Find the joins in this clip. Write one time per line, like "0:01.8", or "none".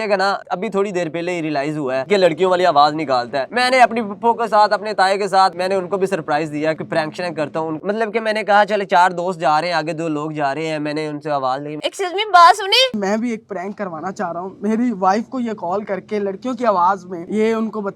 0:05.5
0:06.8
0:07.8
0:11.8
0:12.9